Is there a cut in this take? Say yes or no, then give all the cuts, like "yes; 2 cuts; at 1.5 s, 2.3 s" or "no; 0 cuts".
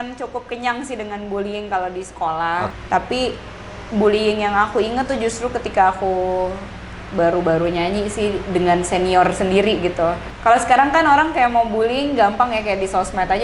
yes; 2 cuts; at 2.7 s, 10.2 s